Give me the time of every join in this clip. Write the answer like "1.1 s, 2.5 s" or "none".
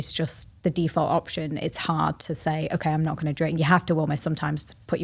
none

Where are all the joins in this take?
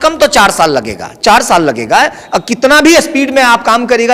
none

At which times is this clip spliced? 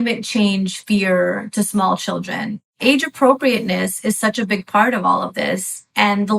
2.8 s

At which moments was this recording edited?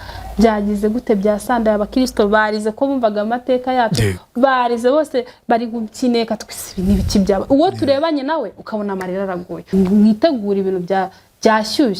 9.6 s

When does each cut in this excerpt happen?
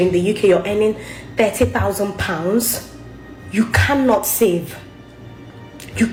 none

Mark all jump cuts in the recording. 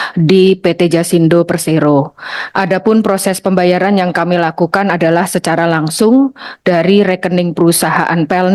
none

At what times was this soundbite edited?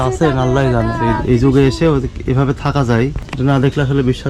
1.0 s, 3.2 s

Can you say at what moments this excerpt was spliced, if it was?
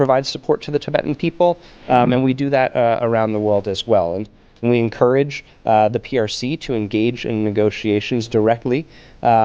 4.6 s

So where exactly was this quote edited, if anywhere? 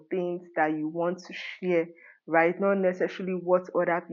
none

